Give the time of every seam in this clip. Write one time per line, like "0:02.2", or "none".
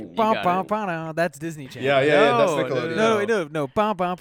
none